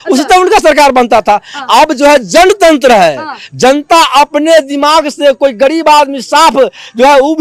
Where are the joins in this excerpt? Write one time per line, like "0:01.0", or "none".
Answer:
none